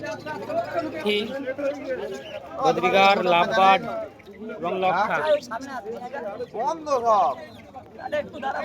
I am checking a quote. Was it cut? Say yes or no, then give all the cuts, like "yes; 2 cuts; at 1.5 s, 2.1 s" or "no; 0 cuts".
yes; 1 cut; at 1.0 s